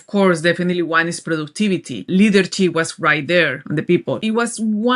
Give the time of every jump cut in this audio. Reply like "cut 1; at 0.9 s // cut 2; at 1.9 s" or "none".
cut 1; at 2.0 s // cut 2; at 4.0 s